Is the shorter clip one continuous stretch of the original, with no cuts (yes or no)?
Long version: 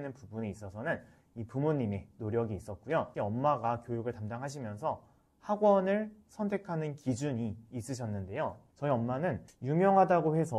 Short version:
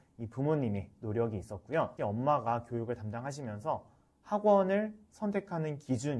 yes